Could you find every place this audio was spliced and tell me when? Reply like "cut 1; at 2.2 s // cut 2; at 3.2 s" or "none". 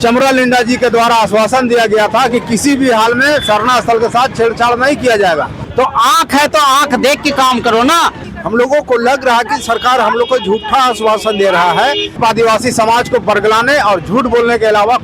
cut 1; at 5.6 s // cut 2; at 8.3 s // cut 3; at 12.2 s